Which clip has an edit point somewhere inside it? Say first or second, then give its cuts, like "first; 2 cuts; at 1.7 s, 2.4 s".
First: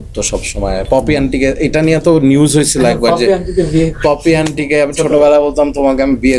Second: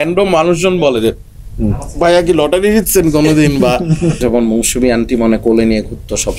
second; 1 cut; at 4.2 s